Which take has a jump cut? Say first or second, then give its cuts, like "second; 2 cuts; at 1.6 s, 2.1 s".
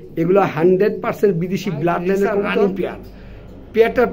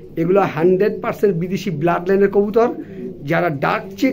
first; 1 cut; at 2.5 s